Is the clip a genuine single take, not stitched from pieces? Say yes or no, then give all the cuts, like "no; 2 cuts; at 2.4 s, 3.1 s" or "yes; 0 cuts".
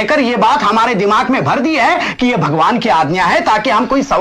yes; 0 cuts